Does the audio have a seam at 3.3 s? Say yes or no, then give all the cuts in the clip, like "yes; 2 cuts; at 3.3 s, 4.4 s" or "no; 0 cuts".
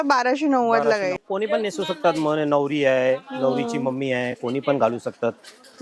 no; 1 cut; at 1.2 s